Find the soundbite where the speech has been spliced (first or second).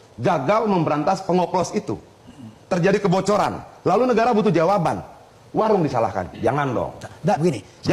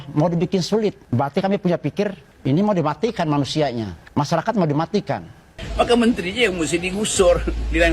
second